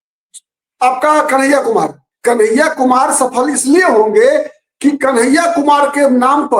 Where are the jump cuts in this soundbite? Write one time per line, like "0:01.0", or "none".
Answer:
0:02.0